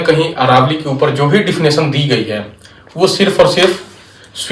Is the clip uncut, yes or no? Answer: yes